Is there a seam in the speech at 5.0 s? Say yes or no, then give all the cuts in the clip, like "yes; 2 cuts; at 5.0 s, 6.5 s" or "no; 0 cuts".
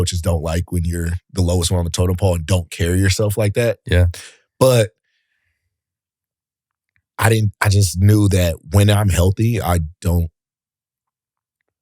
no; 0 cuts